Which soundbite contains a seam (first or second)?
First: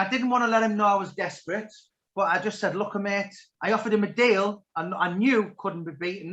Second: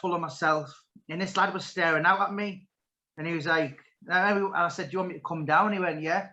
first